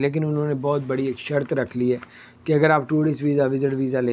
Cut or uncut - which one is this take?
uncut